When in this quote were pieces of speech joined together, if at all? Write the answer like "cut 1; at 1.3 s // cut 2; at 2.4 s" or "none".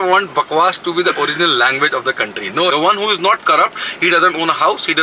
cut 1; at 2.7 s